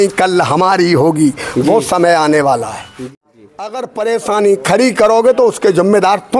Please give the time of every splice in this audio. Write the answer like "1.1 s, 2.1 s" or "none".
3.1 s